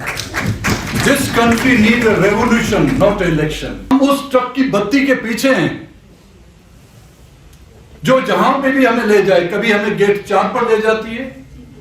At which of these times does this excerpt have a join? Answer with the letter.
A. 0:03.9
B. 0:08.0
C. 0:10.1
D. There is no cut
A